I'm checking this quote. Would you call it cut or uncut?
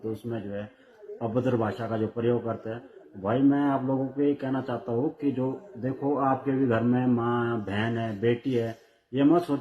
uncut